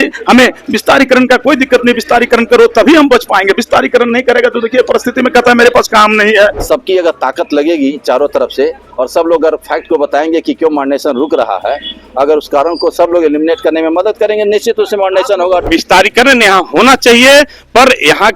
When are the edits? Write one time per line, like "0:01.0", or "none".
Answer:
0:06.6
0:15.7